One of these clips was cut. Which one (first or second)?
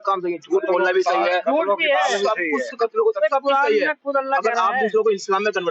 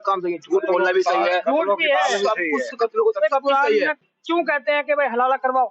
second